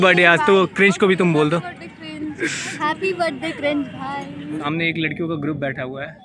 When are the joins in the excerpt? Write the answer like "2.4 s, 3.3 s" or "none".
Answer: 2.5 s, 4.6 s